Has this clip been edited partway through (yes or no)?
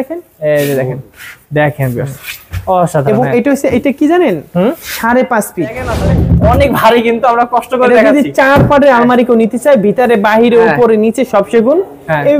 yes